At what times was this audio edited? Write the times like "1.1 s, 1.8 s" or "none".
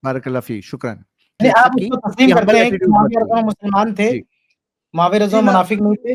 1.4 s